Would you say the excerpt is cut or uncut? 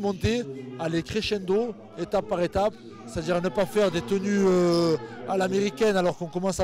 uncut